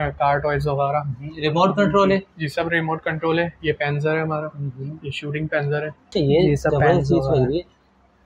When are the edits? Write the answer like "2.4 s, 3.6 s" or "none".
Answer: 6.1 s